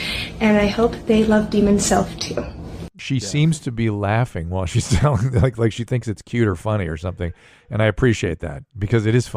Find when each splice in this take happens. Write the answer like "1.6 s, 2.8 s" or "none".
2.9 s